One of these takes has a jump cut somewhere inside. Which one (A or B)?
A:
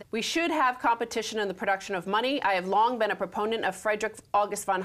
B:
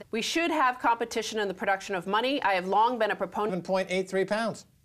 A